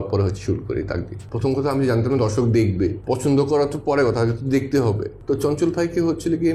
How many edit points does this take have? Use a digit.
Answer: 3